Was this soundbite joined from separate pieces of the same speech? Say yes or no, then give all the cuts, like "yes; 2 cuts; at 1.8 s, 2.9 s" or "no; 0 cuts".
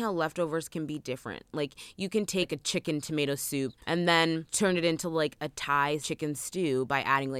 yes; 4 cuts; at 2.5 s, 3.8 s, 4.5 s, 6.1 s